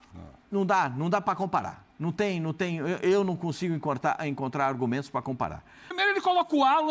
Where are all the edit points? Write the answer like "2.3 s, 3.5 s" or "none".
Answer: 5.9 s